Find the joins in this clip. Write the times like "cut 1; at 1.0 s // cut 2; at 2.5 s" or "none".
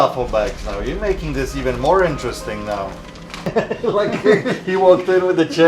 cut 1; at 3.4 s